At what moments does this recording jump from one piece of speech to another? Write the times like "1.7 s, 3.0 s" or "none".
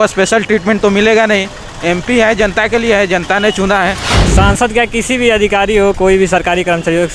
4.1 s